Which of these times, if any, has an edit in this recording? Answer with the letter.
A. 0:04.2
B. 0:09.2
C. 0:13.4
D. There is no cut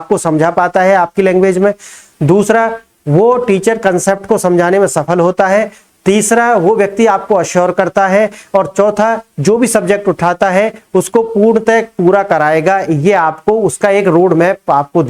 D